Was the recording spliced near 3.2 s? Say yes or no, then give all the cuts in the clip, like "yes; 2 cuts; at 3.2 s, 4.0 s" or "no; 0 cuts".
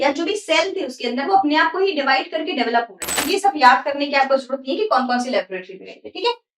yes; 1 cut; at 3.2 s